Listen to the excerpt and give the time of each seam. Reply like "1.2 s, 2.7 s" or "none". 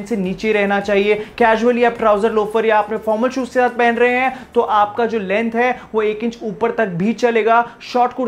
none